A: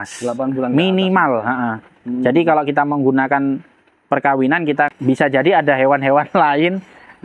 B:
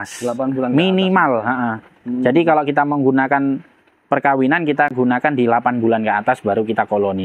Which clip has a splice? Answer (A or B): A